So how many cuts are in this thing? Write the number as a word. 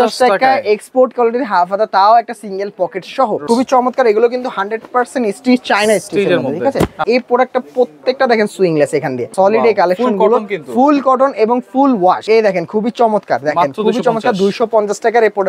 four